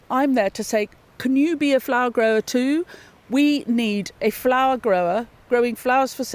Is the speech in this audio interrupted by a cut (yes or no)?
no